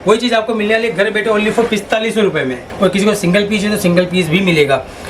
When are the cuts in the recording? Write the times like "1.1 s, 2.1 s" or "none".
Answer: 2.6 s